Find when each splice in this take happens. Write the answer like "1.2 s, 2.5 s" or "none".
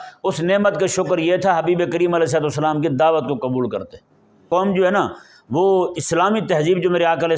4.5 s